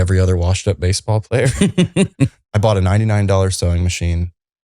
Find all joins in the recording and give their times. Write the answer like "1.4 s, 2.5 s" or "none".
2.4 s